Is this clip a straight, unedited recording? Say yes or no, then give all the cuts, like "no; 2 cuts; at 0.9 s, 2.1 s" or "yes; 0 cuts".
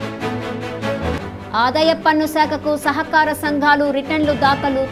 yes; 0 cuts